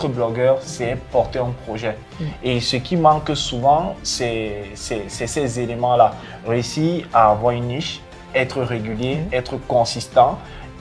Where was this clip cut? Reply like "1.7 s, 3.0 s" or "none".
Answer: none